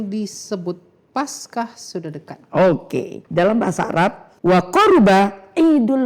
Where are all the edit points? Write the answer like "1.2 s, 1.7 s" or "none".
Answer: 3.2 s, 4.3 s